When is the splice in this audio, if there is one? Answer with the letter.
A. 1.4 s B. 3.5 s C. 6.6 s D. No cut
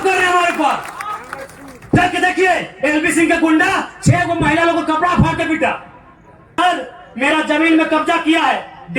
C